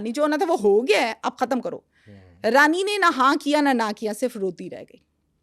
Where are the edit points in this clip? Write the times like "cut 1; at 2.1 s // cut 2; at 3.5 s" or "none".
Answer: none